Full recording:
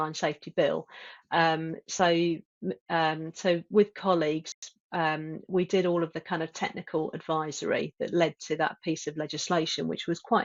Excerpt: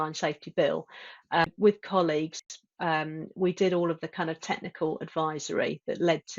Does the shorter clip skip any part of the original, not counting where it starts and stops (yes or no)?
yes